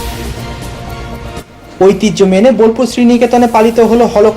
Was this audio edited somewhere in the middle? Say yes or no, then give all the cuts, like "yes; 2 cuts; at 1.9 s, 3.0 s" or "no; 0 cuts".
yes; 1 cut; at 1.1 s